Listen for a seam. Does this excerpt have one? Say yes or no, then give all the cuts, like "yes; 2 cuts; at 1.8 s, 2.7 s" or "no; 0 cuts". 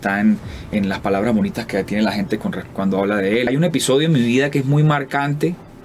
yes; 1 cut; at 3.5 s